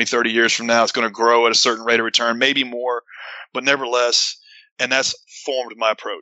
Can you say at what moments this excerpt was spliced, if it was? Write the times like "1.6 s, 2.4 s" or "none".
5.1 s